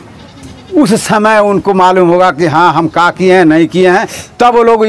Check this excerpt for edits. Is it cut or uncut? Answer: uncut